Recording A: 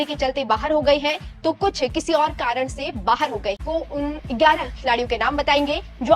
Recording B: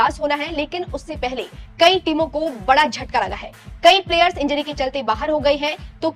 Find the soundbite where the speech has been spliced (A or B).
A